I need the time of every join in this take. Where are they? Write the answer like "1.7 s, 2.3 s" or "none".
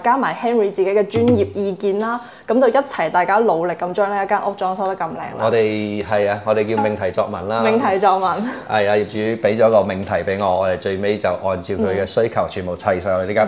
none